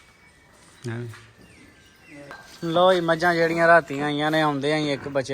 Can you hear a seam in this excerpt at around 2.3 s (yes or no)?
yes